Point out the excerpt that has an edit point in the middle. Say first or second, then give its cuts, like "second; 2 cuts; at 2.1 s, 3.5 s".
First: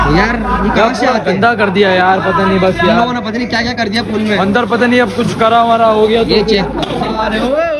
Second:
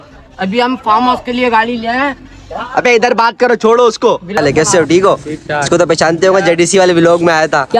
second; 1 cut; at 4.4 s